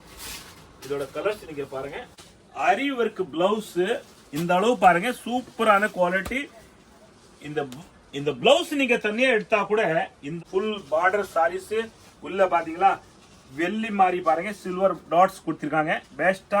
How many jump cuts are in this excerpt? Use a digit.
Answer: 2